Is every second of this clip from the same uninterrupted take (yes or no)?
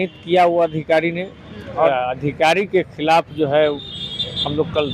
no